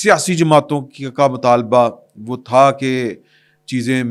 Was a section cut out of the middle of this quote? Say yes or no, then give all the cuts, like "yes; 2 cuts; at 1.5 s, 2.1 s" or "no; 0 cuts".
no; 0 cuts